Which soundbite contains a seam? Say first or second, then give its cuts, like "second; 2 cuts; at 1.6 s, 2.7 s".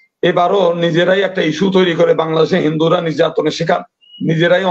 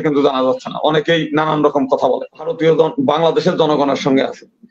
second; 1 cut; at 2.5 s